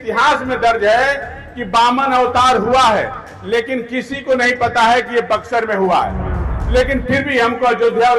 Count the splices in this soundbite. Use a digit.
1